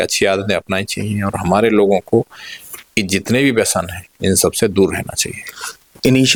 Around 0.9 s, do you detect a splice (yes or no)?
no